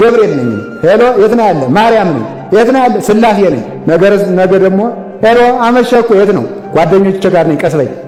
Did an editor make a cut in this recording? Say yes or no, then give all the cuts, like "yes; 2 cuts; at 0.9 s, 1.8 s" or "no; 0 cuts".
no; 0 cuts